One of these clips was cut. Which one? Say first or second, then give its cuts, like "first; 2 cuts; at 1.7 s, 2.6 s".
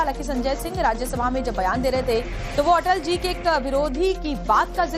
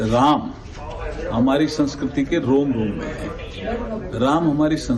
first; 1 cut; at 1.4 s